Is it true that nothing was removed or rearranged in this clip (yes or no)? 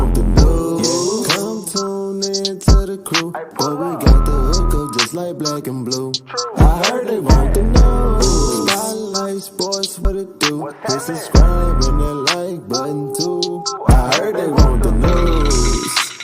no